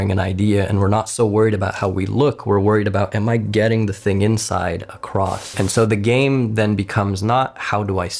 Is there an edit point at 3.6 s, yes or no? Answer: no